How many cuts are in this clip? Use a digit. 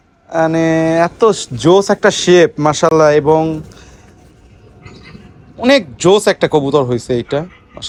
0